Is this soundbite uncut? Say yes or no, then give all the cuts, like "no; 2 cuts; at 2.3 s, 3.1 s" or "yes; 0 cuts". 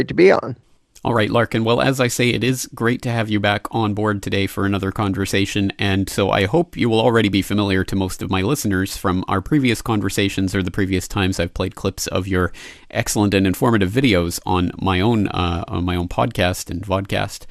yes; 0 cuts